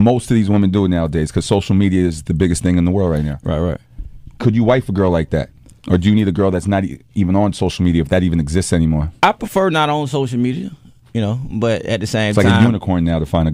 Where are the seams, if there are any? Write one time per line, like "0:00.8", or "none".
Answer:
0:12.1